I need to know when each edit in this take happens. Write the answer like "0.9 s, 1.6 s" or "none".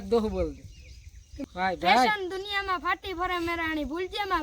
1.3 s